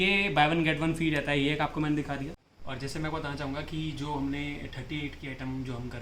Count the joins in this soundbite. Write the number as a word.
zero